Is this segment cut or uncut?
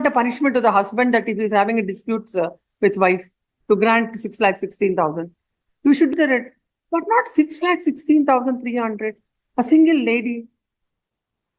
cut